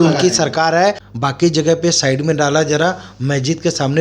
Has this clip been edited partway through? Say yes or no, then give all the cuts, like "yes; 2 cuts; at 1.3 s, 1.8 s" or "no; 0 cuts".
yes; 1 cut; at 1.1 s